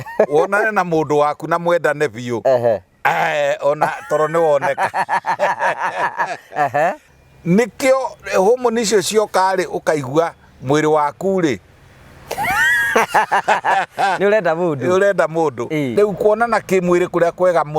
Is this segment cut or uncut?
cut